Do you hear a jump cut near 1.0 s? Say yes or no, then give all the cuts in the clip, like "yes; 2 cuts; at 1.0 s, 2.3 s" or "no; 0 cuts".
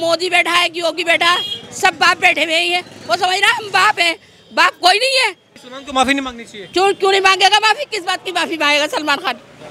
no; 1 cut; at 5.5 s